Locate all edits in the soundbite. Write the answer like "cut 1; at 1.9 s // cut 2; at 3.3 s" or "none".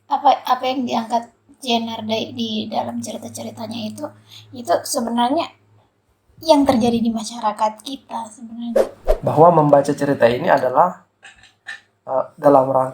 cut 1; at 9.0 s